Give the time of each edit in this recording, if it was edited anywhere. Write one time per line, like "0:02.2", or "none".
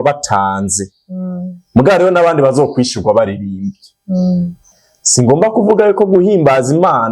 0:04.7

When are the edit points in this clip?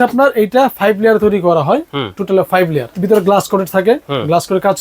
0:02.9

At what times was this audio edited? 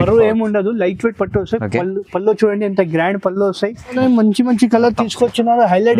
0:04.0

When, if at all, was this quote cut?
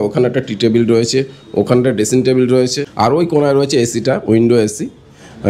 0:02.8

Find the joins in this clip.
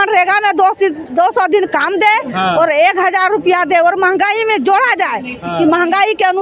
none

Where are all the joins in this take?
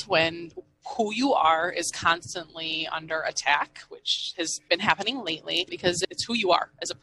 0:06.0

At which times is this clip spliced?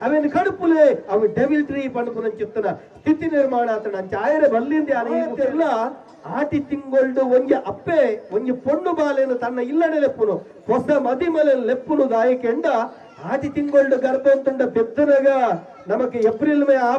0:05.3

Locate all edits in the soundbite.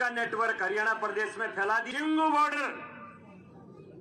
0:01.9

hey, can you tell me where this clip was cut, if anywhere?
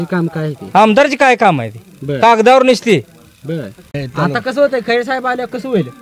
0:04.0

